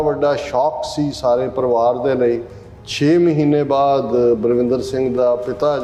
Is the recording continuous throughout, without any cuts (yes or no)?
yes